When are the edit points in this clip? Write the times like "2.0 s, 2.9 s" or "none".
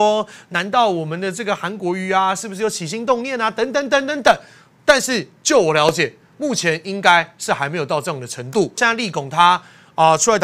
8.8 s